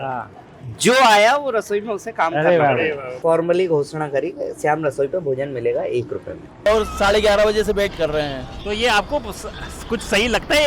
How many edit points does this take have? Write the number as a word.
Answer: two